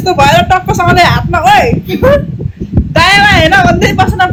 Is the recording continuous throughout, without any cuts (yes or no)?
yes